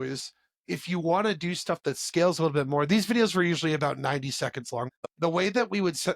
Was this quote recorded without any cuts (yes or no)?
no